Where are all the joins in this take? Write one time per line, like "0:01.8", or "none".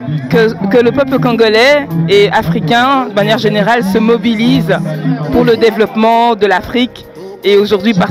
none